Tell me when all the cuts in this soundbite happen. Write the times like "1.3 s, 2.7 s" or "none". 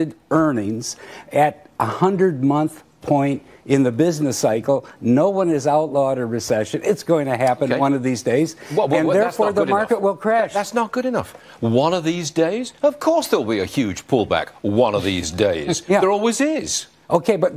3.9 s